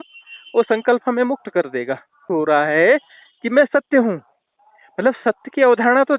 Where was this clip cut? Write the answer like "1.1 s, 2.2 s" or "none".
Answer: 2.2 s